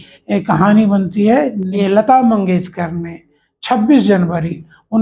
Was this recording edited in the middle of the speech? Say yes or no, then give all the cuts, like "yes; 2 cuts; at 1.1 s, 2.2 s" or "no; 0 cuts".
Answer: yes; 1 cut; at 1.8 s